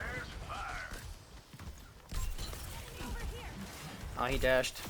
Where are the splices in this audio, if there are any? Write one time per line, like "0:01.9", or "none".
none

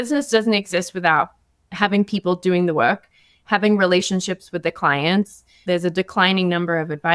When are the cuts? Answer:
0:05.6

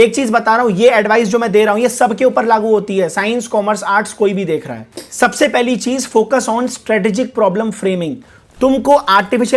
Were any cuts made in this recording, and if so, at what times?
none

